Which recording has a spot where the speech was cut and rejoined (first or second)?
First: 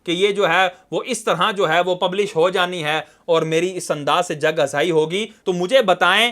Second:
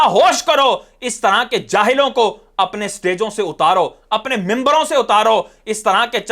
first